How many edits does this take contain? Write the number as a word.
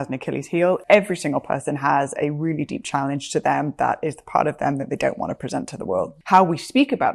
two